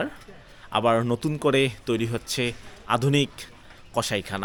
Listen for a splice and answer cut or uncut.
uncut